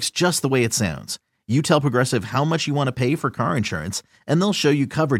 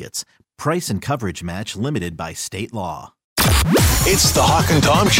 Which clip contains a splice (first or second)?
second